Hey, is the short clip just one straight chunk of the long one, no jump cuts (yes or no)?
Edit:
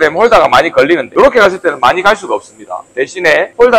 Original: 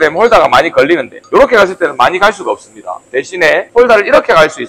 no